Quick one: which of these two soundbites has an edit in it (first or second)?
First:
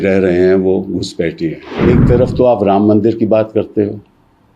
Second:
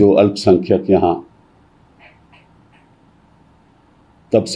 first